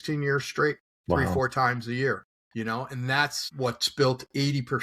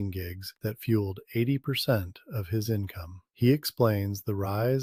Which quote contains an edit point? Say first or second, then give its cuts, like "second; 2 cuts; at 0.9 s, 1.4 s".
first; 3 cuts; at 1.3 s, 2.4 s, 3.4 s